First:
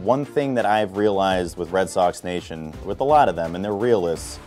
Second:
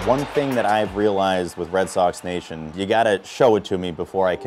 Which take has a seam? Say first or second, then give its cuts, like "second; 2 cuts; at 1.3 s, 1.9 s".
second; 1 cut; at 2.7 s